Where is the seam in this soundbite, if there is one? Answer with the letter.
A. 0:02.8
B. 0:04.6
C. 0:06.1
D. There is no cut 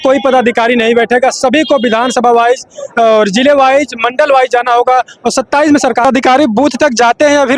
C